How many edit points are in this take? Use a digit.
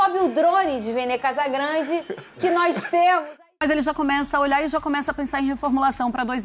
1